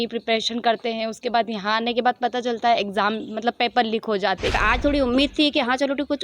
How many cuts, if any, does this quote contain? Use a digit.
1